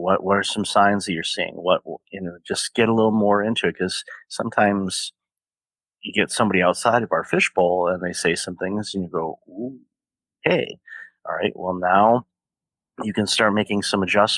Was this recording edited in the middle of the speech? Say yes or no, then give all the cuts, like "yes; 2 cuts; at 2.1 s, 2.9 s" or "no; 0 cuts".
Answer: no; 0 cuts